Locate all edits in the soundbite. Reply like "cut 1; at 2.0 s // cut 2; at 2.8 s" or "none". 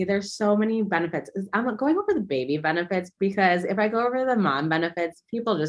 none